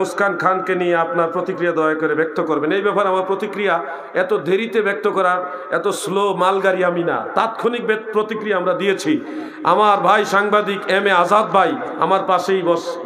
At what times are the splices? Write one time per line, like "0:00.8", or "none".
none